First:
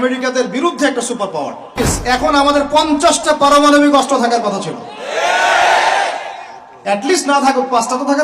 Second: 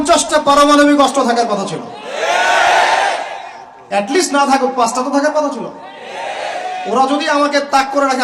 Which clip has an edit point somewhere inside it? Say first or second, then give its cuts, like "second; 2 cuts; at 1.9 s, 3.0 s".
first; 1 cut; at 1.9 s